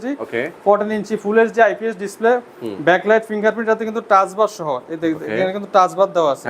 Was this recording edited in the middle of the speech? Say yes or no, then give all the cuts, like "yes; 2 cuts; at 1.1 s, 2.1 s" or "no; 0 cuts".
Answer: no; 0 cuts